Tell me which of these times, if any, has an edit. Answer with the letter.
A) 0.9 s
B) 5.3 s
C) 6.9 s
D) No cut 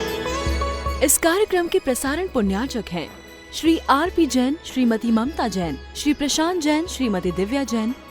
A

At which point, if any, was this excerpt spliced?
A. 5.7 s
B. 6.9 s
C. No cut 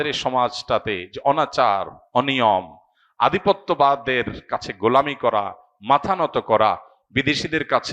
C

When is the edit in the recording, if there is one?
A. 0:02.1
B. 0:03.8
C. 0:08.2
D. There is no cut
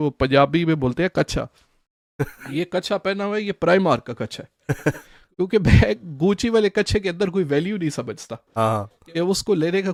D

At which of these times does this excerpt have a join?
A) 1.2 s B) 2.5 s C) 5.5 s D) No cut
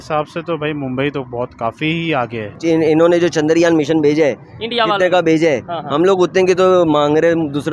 B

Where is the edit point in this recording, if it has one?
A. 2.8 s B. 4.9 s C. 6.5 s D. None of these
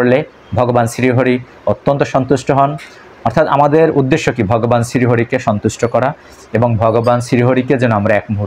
D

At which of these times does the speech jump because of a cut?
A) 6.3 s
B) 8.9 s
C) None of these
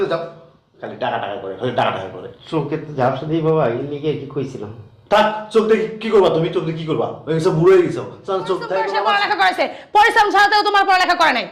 B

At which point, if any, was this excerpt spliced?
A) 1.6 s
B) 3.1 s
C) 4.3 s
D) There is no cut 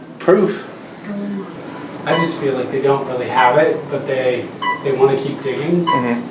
A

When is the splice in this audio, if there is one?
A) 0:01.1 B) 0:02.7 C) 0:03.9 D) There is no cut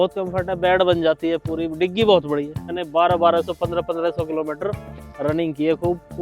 B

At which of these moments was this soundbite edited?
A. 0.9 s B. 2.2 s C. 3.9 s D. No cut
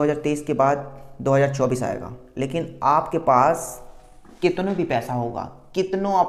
D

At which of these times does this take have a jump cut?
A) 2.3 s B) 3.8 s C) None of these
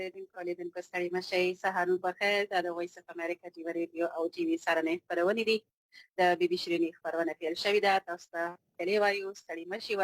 C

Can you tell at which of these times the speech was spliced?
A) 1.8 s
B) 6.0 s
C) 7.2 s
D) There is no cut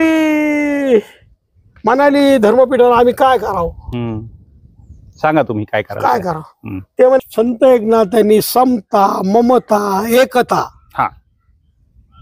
C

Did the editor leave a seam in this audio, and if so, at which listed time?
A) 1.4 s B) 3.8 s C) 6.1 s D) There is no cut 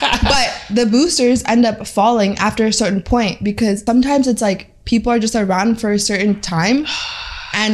B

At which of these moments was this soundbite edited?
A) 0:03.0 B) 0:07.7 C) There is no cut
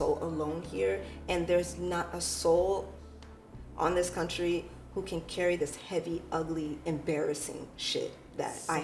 C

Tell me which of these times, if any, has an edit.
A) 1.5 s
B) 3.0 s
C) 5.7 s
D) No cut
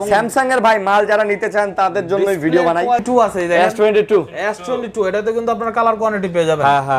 B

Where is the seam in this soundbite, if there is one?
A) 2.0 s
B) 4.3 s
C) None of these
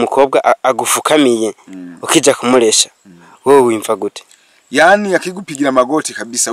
C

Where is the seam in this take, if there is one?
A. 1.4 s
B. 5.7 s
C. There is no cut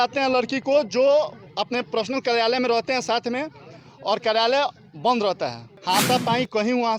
B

